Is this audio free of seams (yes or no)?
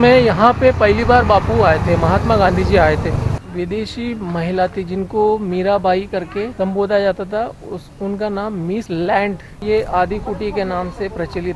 no